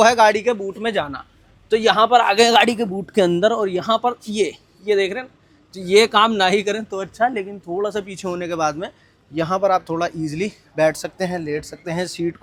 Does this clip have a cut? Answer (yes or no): no